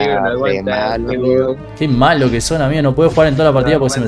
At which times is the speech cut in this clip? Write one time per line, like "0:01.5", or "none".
none